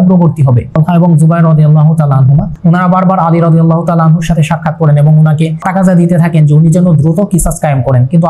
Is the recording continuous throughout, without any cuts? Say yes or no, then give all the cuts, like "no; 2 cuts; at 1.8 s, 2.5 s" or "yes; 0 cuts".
no; 3 cuts; at 0.8 s, 2.5 s, 5.6 s